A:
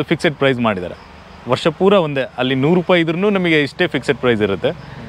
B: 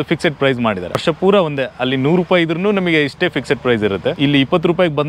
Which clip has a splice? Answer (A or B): B